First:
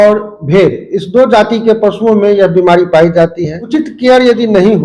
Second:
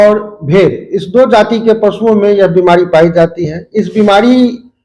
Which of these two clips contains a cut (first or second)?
first